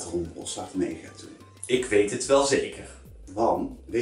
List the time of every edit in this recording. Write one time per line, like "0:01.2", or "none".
none